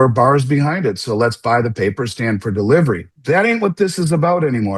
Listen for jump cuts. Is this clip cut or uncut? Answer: cut